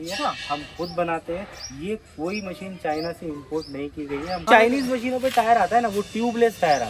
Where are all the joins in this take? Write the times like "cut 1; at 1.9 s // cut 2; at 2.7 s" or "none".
cut 1; at 4.4 s